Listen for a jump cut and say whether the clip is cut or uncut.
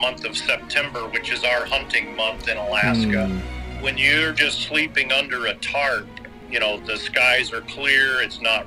cut